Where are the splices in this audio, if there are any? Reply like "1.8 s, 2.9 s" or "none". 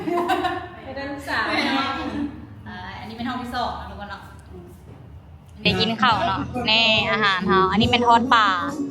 5.6 s